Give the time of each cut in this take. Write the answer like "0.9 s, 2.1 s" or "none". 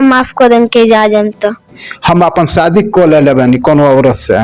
1.9 s

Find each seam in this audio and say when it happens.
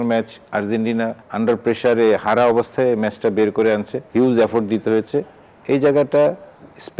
1.2 s, 4.0 s

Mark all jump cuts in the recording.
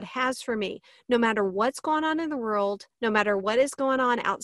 2.9 s

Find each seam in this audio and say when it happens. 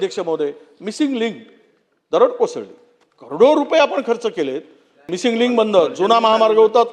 5.0 s

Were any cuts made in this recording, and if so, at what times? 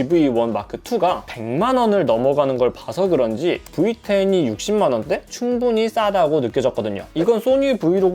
7.1 s

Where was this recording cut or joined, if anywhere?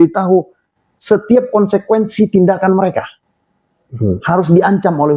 none

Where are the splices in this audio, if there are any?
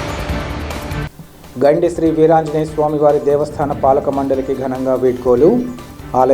none

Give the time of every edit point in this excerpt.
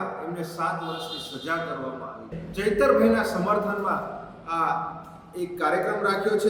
2.4 s

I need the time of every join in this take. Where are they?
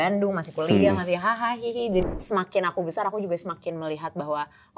2.0 s

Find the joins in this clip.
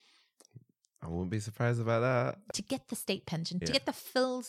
2.4 s

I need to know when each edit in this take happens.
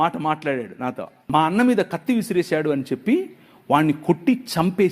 1.1 s

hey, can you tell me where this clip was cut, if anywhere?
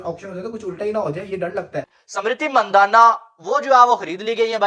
1.8 s

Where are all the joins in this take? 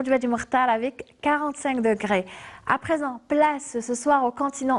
1.1 s

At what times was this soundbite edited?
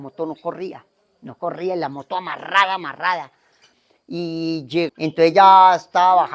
4.9 s

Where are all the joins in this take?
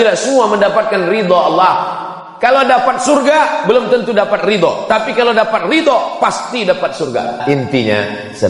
7.4 s

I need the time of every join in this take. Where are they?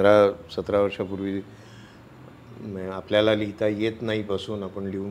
none

